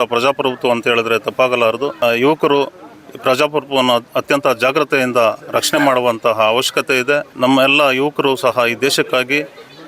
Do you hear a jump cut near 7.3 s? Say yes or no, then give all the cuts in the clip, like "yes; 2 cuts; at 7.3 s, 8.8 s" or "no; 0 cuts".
yes; 2 cuts; at 2.0 s, 7.3 s